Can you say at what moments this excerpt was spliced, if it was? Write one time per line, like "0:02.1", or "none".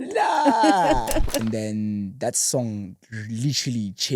0:01.4